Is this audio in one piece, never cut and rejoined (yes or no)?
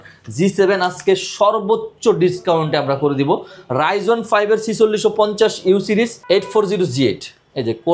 no